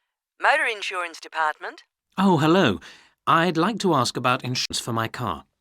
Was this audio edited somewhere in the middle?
yes; 1 cut; at 4.6 s

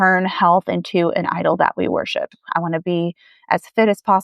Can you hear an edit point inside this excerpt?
yes; 1 cut; at 2.3 s

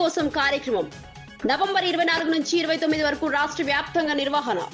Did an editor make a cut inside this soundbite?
no; 0 cuts

